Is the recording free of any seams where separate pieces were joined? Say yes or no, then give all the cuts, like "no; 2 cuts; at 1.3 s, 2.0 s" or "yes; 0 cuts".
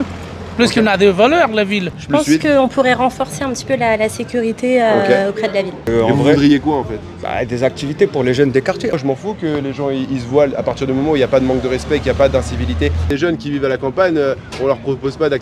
no; 4 cuts; at 1.9 s, 5.8 s, 8.9 s, 13.1 s